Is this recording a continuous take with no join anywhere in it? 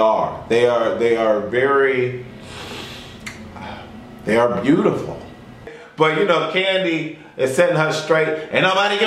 no; 1 cut; at 5.7 s

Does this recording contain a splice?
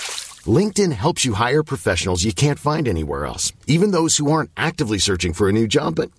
no; 0 cuts

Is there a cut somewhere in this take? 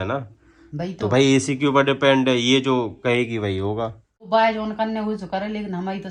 yes; 1 cut; at 4.3 s

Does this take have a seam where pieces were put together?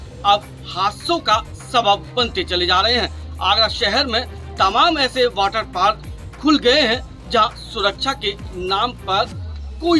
no; 0 cuts

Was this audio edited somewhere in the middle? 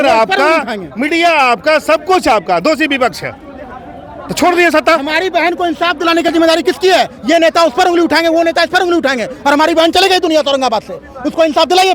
no; 0 cuts

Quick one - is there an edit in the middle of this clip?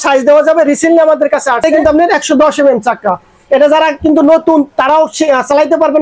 yes; 1 cut; at 1.8 s

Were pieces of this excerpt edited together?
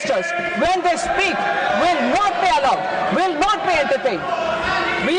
no; 0 cuts

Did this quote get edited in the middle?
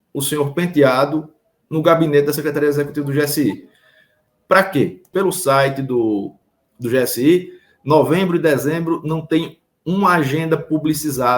yes; 1 cut; at 5.1 s

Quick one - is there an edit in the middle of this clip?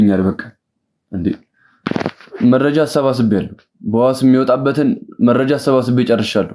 no; 0 cuts

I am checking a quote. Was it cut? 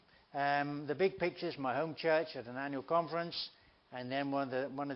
no; 0 cuts

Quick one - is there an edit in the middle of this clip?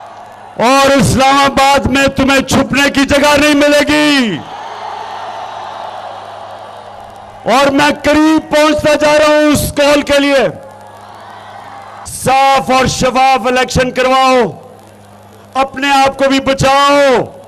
yes; 1 cut; at 12.1 s

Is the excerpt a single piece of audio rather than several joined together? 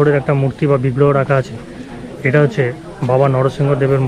yes; 0 cuts

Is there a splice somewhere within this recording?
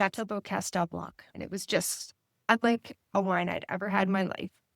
yes; 2 cuts; at 1.3 s, 2.4 s

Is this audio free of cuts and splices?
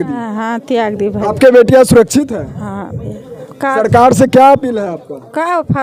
yes; 0 cuts

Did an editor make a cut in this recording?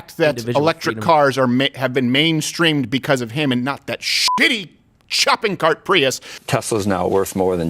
yes; 1 cut; at 6.4 s

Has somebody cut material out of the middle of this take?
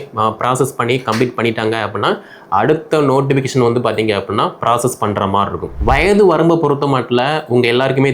yes; 1 cut; at 5.6 s

